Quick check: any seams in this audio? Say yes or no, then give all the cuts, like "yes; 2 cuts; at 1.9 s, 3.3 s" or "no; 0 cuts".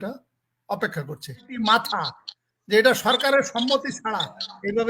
yes; 1 cut; at 1.6 s